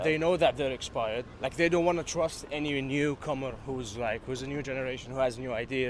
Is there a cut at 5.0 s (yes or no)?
no